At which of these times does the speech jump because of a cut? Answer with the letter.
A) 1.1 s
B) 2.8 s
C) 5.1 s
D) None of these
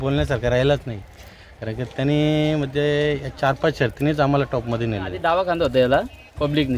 C